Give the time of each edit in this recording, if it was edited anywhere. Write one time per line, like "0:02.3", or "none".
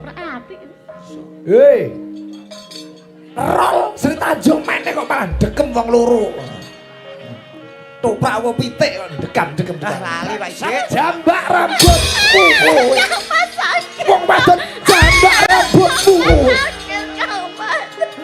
0:10.9